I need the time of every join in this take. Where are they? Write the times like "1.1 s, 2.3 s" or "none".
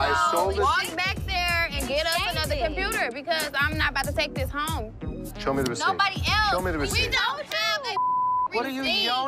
none